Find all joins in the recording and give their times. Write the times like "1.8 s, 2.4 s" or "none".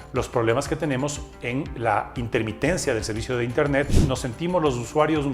4.0 s